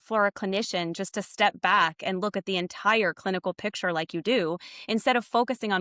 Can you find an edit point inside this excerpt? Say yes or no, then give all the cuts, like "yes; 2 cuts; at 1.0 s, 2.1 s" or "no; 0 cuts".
no; 0 cuts